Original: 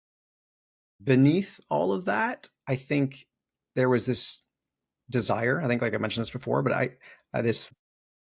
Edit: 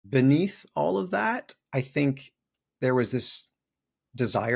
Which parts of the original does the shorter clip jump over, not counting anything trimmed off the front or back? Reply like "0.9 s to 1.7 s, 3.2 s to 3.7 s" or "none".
none